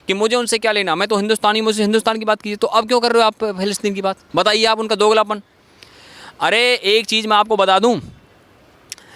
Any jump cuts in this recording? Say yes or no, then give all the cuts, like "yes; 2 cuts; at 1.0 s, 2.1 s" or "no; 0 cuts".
no; 0 cuts